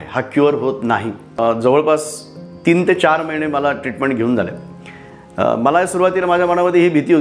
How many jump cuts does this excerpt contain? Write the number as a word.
one